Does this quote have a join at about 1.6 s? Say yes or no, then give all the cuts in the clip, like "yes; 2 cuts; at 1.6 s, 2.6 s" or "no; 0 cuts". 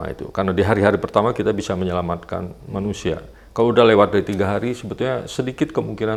no; 0 cuts